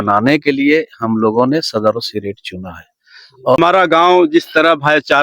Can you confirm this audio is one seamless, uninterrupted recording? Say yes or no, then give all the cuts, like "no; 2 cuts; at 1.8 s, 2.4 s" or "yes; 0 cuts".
no; 1 cut; at 3.6 s